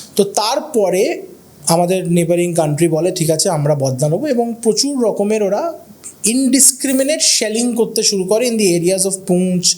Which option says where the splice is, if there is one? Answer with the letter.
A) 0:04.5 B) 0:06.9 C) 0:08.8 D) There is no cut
D